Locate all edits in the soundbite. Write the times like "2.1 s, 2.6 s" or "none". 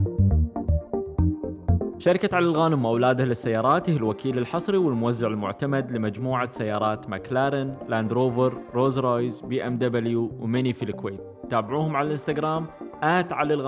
2.0 s